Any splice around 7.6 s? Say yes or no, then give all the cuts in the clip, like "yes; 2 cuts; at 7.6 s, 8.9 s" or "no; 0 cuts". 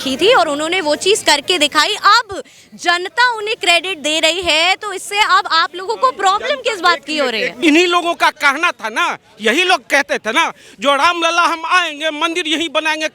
yes; 1 cut; at 7.6 s